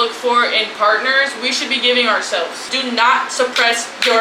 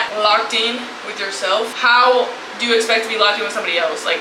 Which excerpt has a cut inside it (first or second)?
first